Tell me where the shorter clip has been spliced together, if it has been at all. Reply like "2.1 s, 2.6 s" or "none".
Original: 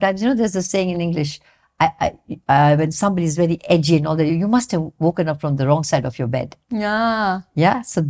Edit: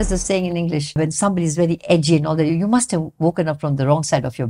1.0 s